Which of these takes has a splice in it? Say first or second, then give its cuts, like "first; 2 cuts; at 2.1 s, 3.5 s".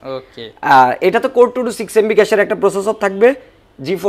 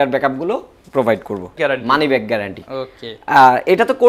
second; 1 cut; at 1.5 s